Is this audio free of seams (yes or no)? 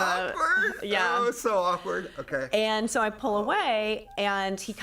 yes